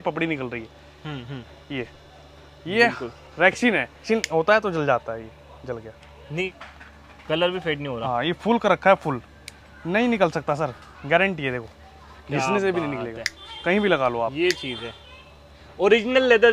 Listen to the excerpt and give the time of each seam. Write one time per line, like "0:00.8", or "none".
0:04.0
0:06.5